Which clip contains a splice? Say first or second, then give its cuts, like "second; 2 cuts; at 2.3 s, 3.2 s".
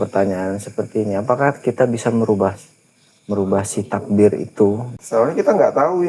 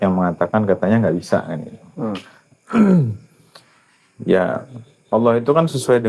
first; 1 cut; at 4.9 s